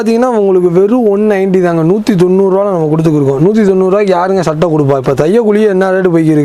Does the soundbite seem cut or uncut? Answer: uncut